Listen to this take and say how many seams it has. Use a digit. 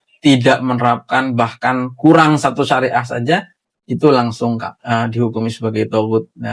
0